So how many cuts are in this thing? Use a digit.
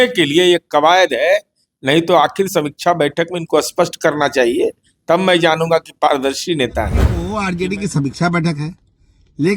1